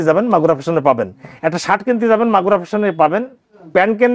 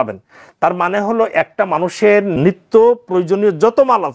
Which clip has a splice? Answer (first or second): second